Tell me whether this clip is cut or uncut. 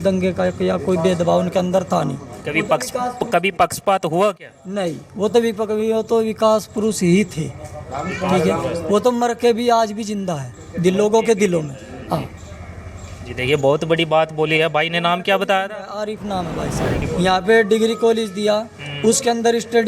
cut